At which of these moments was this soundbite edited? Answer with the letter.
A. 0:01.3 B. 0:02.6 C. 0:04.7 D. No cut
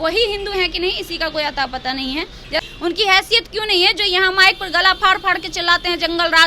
B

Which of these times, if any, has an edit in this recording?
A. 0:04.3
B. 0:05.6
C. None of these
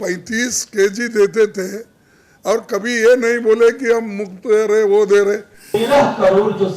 B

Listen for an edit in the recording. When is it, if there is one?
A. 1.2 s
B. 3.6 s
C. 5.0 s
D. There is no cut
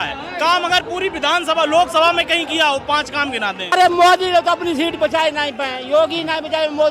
B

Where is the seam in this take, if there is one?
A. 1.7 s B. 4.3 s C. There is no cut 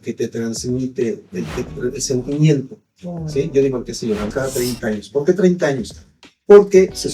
B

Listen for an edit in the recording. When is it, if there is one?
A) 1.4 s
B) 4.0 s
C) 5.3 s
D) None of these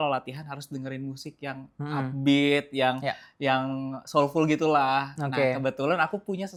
D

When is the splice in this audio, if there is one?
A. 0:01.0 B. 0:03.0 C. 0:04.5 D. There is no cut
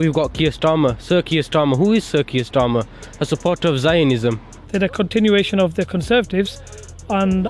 C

